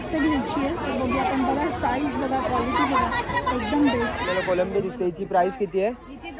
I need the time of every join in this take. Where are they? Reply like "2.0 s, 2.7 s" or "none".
4.4 s